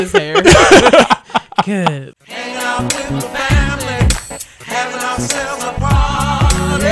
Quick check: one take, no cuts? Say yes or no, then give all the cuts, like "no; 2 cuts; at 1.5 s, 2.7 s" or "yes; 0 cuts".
no; 1 cut; at 2.0 s